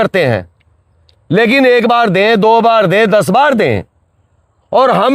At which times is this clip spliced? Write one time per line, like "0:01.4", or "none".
none